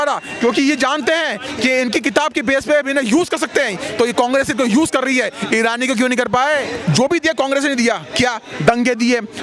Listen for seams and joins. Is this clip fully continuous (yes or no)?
no